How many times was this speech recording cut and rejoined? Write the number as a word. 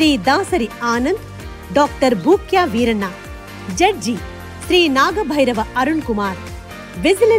zero